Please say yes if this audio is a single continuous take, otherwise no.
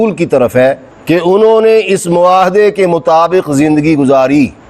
yes